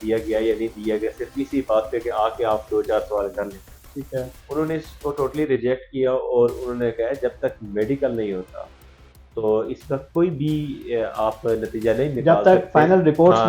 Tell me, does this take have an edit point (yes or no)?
no